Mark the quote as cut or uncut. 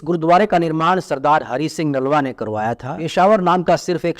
cut